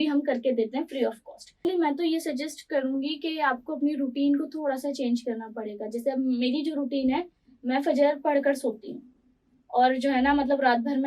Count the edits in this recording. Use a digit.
1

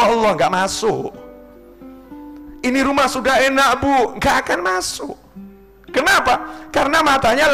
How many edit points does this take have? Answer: 2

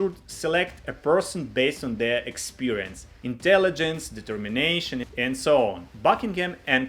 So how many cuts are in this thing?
0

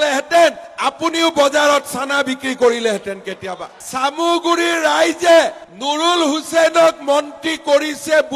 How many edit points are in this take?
0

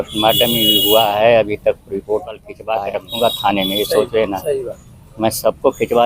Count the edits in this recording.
1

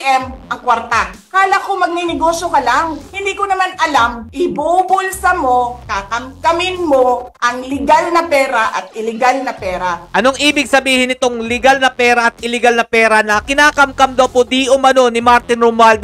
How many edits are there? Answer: 3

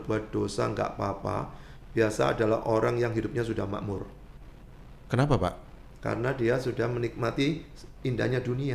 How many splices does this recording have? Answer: 0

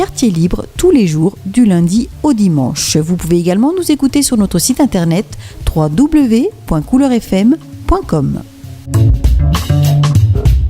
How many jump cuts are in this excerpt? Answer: 1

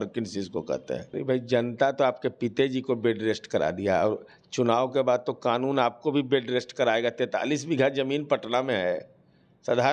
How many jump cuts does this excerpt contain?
1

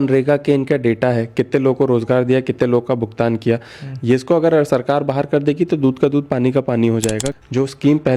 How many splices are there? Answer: 1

